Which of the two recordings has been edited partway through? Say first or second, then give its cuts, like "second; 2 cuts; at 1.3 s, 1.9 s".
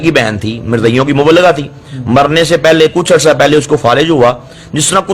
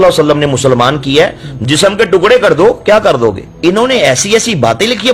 second; 1 cut; at 3.5 s